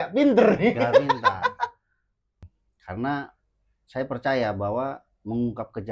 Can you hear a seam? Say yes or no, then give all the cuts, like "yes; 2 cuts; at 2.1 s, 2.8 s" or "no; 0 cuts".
yes; 1 cut; at 2.3 s